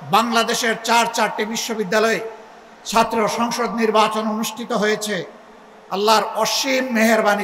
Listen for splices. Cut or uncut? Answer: uncut